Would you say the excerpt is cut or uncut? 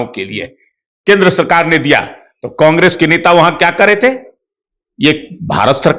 uncut